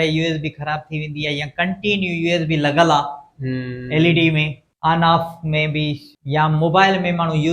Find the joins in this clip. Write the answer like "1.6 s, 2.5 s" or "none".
4.6 s, 6.1 s